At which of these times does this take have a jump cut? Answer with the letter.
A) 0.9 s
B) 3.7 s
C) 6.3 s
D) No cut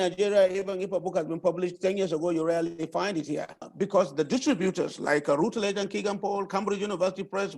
B